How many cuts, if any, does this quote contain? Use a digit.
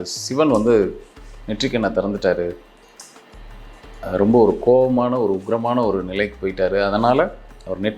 0